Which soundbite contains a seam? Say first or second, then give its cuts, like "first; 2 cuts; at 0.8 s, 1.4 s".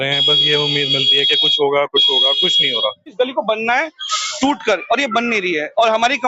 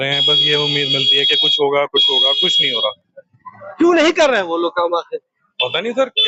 first; 1 cut; at 3.1 s